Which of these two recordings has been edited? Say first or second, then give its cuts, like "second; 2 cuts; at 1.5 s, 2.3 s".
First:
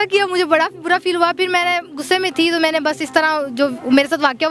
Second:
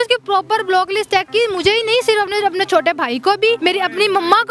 second; 1 cut; at 3.6 s